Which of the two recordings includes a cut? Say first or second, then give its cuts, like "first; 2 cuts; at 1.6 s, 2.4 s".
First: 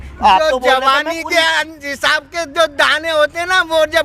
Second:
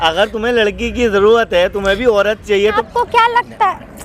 second; 1 cut; at 2.8 s